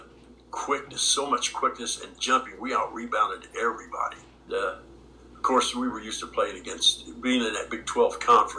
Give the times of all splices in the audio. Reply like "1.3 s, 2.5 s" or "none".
4.4 s